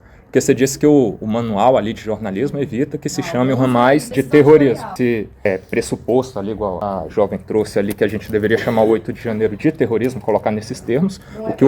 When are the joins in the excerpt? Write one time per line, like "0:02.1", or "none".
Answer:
0:04.1
0:04.9
0:06.8